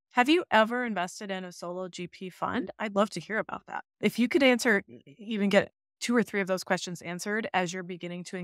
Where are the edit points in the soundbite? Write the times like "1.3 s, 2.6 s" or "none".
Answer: none